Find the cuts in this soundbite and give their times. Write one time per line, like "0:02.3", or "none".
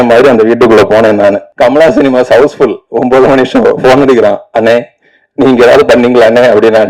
0:01.5